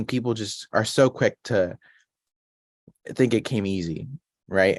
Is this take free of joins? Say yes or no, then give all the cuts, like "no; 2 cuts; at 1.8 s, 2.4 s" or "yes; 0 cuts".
yes; 0 cuts